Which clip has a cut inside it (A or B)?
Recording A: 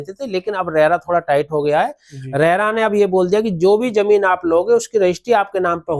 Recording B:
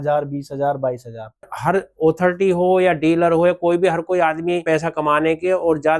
B